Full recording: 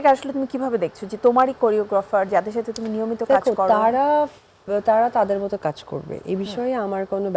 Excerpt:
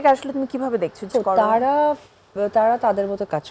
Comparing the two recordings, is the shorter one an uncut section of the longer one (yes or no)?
no